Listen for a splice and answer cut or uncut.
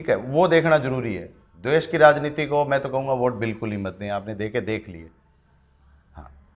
uncut